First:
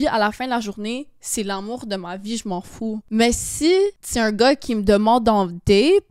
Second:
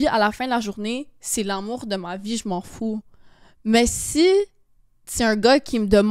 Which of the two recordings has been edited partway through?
first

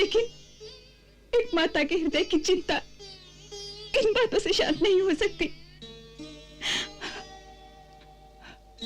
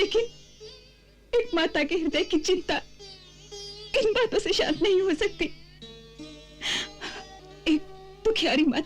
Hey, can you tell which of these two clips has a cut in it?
second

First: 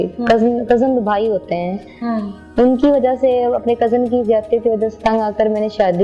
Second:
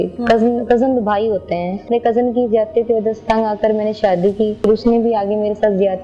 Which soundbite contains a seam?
second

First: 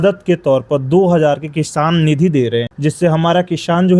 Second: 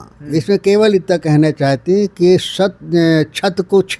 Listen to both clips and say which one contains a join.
first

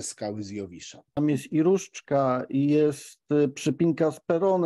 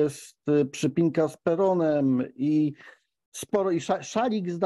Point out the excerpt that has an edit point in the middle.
first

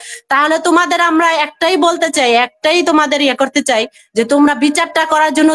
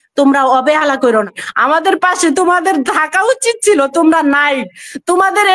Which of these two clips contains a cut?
second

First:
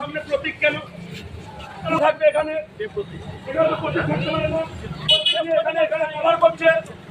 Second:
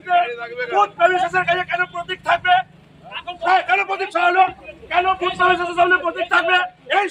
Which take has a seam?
first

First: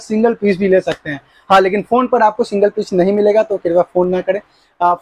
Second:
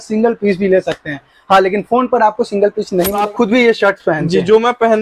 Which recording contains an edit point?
second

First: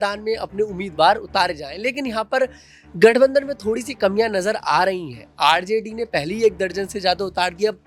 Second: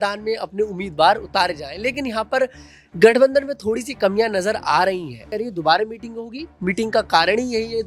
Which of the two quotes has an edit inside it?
second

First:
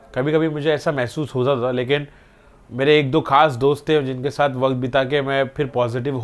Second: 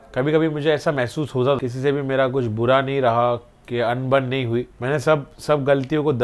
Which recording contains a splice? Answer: second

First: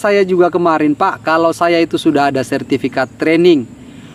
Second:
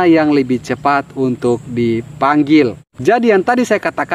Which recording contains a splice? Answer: second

